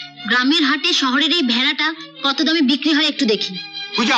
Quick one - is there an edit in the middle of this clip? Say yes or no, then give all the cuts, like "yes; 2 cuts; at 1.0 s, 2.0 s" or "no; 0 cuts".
no; 0 cuts